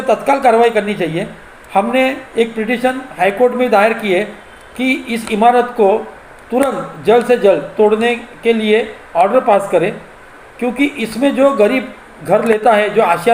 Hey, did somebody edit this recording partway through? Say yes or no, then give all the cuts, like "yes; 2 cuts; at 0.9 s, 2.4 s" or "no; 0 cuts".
no; 0 cuts